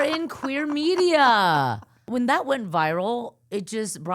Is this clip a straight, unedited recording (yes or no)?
no